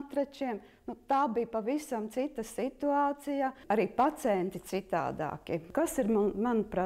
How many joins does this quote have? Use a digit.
1